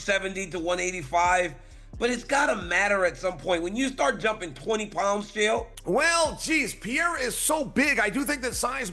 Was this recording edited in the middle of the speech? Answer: yes; 1 cut; at 5.7 s

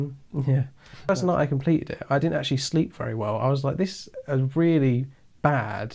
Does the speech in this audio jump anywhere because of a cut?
yes; 1 cut; at 1.1 s

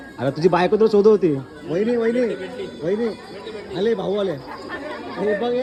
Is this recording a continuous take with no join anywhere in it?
yes; 0 cuts

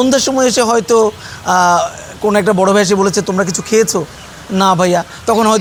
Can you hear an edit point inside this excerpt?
no; 0 cuts

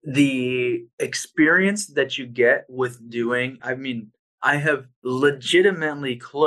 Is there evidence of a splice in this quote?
yes; 3 cuts; at 0.9 s, 3.6 s, 4.9 s

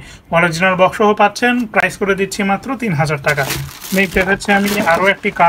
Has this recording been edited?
no; 0 cuts

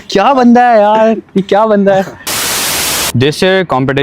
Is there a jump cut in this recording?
yes; 1 cut; at 2.5 s

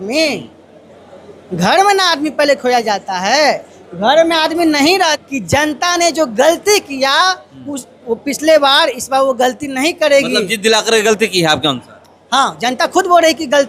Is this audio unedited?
no; 1 cut; at 5.2 s

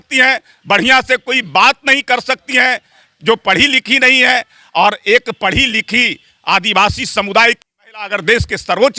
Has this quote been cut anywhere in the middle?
no; 0 cuts

